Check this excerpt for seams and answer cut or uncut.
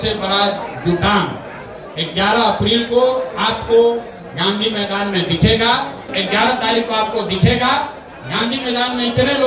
cut